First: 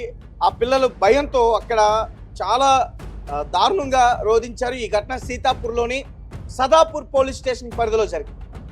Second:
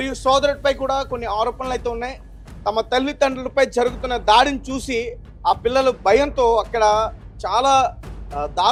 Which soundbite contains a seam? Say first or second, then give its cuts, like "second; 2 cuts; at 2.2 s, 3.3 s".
first; 1 cut; at 5.8 s